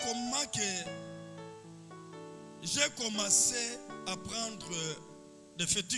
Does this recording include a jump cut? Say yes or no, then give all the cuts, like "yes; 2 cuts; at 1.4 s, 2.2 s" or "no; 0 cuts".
no; 0 cuts